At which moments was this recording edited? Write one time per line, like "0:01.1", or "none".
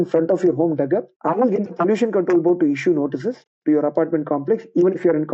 0:01.1